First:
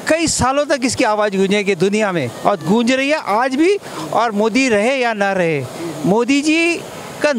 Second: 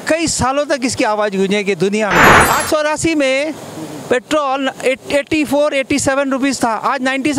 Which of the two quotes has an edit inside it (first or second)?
second